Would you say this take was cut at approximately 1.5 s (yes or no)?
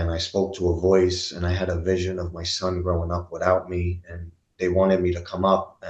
no